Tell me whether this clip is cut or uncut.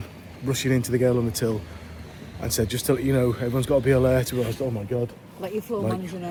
uncut